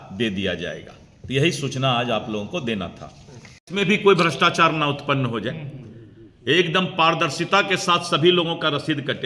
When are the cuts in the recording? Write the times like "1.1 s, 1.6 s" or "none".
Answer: none